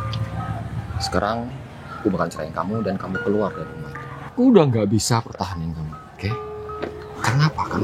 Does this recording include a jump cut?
yes; 1 cut; at 4.3 s

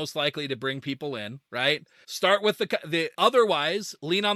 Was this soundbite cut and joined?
yes; 1 cut; at 1.7 s

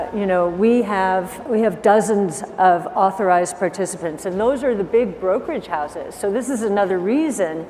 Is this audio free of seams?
no; 1 cut; at 1.4 s

